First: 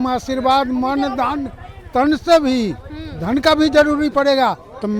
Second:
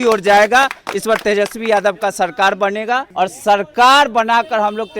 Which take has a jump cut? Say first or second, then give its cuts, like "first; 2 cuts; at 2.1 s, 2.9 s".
second; 1 cut; at 3.1 s